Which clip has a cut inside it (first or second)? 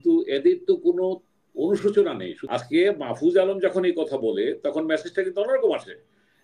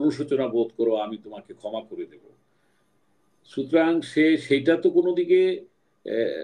first